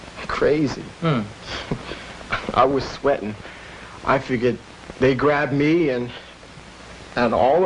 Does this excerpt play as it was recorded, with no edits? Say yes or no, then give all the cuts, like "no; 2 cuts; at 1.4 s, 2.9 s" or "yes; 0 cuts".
no; 1 cut; at 4.6 s